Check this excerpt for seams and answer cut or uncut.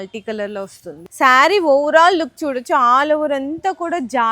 cut